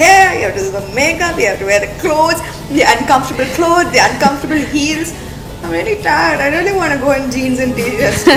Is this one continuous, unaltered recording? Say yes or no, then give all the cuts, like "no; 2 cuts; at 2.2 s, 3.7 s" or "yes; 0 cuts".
yes; 0 cuts